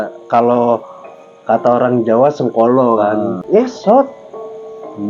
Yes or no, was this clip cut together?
yes